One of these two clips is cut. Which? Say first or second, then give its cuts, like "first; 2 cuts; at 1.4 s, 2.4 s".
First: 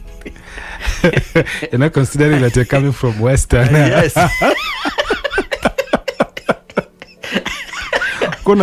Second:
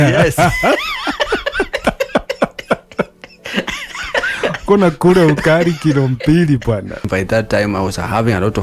second; 1 cut; at 7.1 s